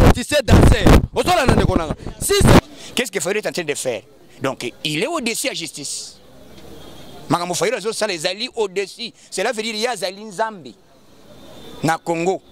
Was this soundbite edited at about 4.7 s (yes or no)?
no